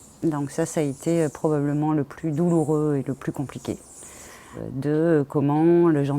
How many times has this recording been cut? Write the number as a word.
one